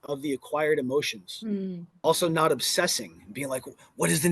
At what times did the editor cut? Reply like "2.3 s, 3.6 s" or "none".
1.8 s